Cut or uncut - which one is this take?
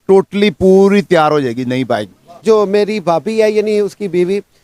cut